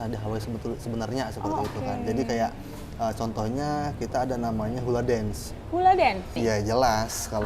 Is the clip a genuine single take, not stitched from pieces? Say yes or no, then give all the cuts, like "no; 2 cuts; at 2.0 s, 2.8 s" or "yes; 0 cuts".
no; 1 cut; at 6.3 s